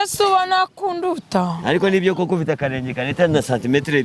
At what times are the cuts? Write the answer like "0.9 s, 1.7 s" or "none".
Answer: none